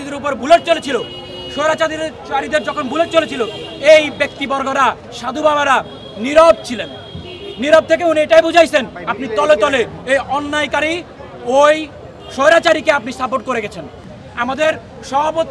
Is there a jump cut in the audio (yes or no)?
yes